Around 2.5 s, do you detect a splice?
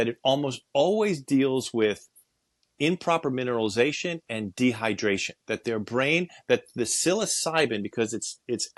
no; 0 cuts

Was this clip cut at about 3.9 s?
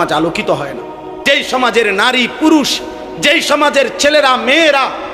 no; 1 cut; at 1.1 s

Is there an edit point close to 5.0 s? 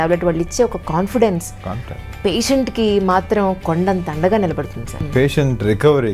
yes; 1 cut; at 5.0 s

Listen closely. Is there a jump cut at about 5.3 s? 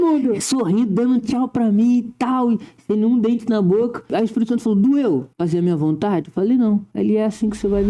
yes; 3 cuts; at 4.1 s, 5.3 s, 6.9 s

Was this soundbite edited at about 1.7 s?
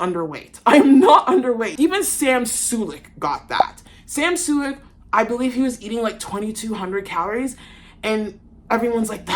yes; 1 cut; at 1.7 s

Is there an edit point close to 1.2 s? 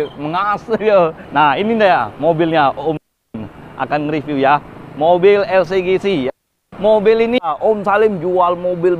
yes; 2 cuts; at 1.2 s, 7.5 s

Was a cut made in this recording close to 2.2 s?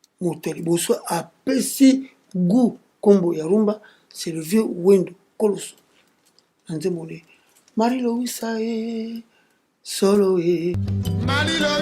no; 1 cut; at 10.9 s

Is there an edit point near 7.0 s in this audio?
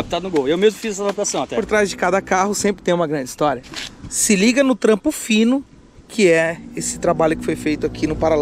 no; 2 cuts; at 1.6 s, 3.6 s

